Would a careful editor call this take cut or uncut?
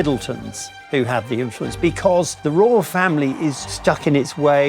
cut